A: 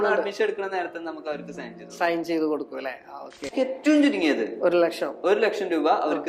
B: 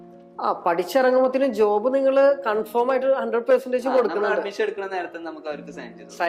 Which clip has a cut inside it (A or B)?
A